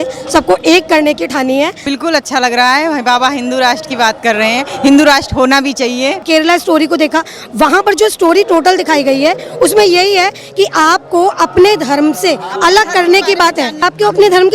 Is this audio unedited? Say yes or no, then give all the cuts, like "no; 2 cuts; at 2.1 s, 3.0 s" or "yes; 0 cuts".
no; 3 cuts; at 1.8 s, 6.2 s, 13.8 s